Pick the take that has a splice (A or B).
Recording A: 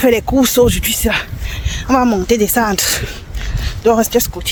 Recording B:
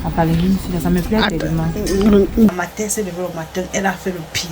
B